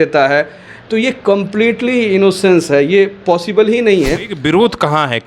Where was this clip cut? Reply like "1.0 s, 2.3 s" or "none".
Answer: 4.3 s